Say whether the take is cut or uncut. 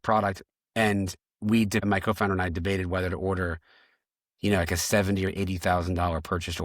cut